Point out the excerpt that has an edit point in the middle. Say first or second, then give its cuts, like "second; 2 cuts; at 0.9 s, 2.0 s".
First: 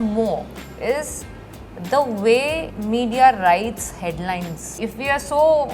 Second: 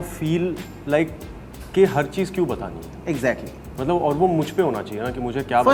first; 2 cuts; at 2.7 s, 4.7 s